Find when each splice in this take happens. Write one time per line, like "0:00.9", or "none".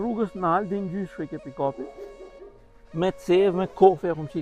none